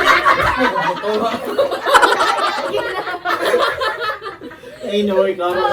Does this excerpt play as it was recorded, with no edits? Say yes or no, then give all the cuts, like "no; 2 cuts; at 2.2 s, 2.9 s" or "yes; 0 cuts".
yes; 0 cuts